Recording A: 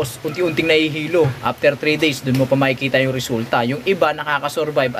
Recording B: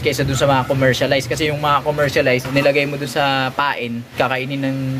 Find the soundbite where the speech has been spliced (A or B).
B